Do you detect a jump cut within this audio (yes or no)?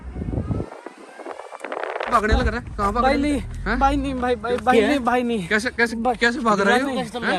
yes